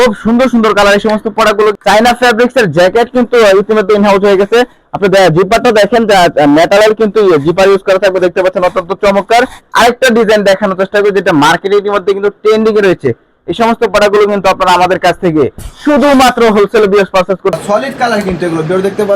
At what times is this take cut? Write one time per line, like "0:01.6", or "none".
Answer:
0:01.8
0:09.6
0:17.6